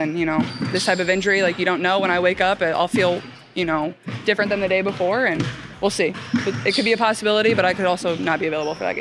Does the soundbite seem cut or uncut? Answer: uncut